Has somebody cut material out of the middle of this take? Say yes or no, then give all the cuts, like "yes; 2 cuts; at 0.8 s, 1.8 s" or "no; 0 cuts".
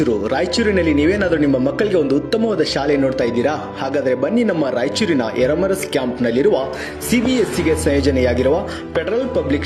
no; 0 cuts